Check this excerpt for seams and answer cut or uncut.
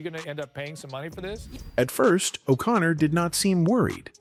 uncut